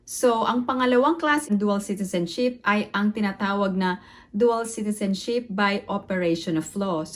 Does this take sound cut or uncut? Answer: cut